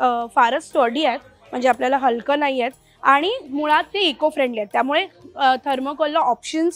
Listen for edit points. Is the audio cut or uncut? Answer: uncut